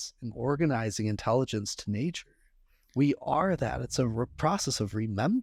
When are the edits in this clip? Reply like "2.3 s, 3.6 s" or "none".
none

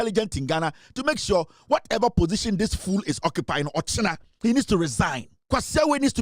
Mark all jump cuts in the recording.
5.3 s

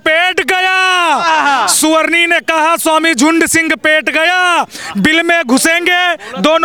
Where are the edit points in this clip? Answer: none

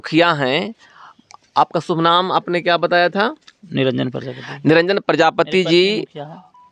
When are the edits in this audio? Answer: none

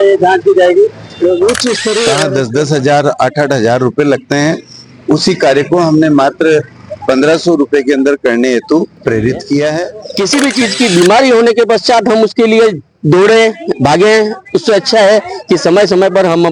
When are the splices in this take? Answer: 2.2 s, 10.0 s

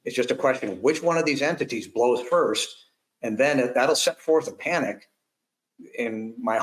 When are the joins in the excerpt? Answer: none

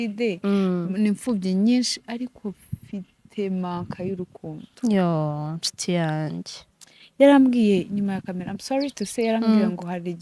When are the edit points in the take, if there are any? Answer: none

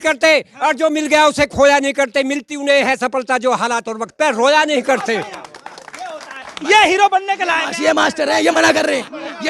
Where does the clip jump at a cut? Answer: none

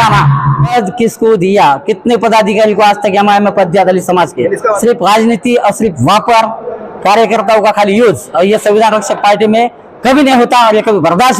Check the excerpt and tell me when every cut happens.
0.7 s, 4.8 s

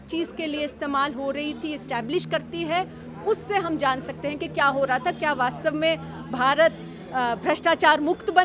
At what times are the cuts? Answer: none

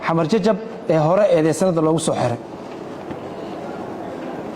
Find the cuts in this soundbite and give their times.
none

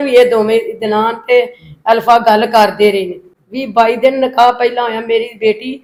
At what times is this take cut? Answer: none

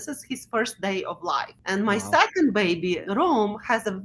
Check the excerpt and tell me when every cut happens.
1.6 s, 3.0 s

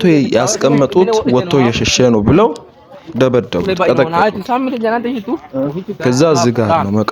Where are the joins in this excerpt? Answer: none

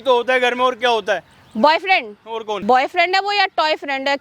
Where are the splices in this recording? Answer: 2.6 s

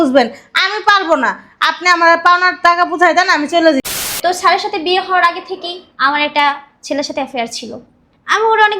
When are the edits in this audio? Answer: 3.8 s

